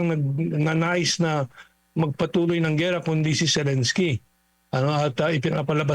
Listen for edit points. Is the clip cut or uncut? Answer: uncut